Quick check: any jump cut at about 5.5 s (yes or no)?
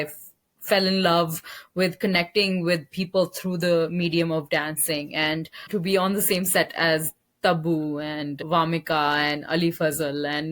yes